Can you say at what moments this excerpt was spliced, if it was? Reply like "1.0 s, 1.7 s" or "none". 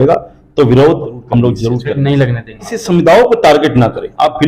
1.7 s, 2.8 s